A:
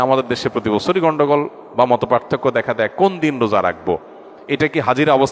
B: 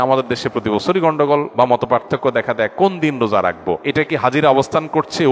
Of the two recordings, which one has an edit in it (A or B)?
B